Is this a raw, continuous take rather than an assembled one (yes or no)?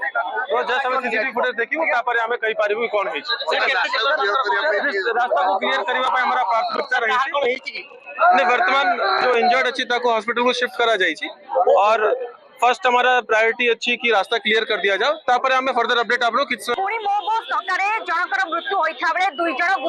no